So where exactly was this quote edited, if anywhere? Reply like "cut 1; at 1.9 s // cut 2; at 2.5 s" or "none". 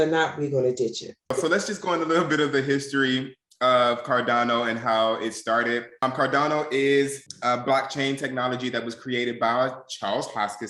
cut 1; at 1.3 s // cut 2; at 5.9 s // cut 3; at 7.3 s

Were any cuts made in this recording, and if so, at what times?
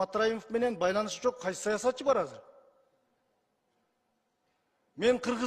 none

